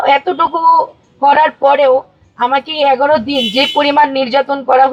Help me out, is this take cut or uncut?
uncut